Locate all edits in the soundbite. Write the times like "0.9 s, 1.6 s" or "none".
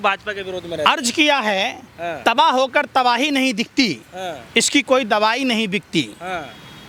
none